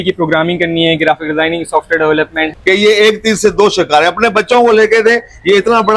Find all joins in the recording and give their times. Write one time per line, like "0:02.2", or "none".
0:02.5